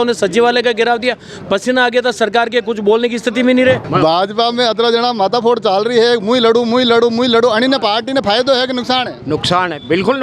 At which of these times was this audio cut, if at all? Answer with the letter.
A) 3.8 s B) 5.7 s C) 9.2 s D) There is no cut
A